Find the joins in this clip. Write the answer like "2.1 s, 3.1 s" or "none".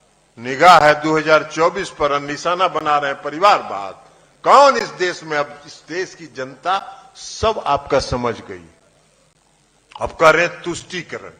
none